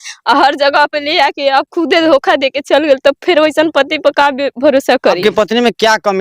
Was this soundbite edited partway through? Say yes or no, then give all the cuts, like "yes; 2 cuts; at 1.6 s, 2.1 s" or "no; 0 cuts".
yes; 1 cut; at 5.2 s